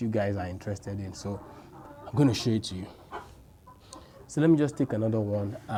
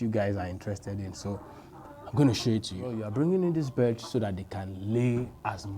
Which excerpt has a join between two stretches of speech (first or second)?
second